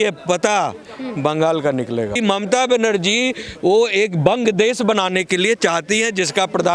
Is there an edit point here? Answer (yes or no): yes